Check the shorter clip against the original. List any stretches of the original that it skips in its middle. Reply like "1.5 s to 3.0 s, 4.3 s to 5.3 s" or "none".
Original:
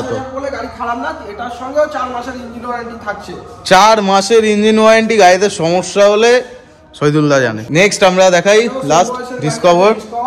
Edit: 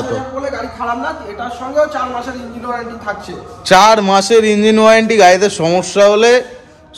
none